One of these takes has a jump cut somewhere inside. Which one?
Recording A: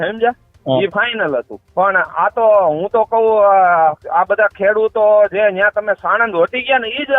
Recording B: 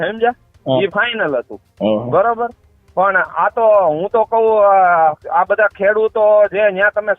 A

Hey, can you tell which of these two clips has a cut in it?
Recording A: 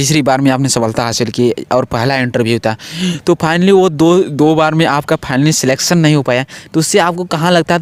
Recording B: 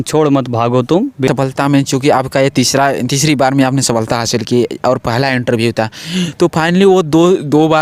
B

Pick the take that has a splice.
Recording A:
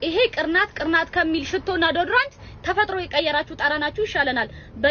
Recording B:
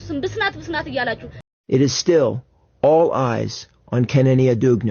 B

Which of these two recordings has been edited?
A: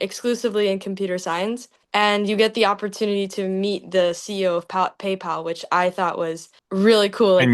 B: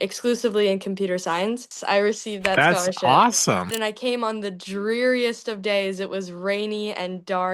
B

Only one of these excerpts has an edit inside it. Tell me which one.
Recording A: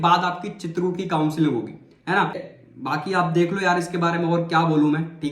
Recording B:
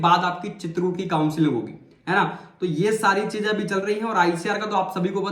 A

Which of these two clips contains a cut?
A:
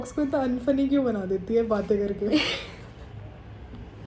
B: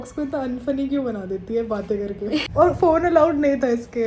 B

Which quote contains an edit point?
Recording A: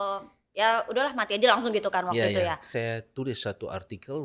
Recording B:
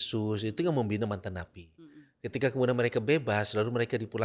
A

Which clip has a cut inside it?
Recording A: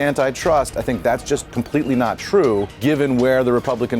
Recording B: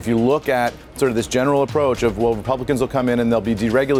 A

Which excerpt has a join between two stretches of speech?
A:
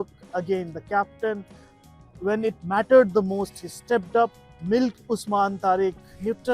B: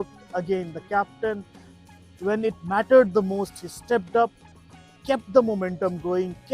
A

